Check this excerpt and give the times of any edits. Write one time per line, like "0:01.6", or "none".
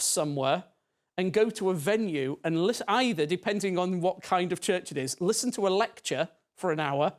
none